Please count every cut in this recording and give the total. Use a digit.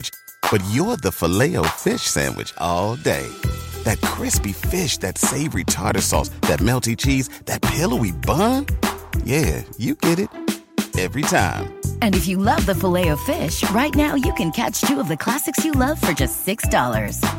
0